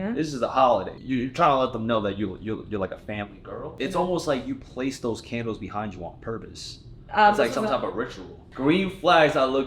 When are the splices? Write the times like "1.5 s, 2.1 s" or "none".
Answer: 0.9 s, 3.8 s, 8.4 s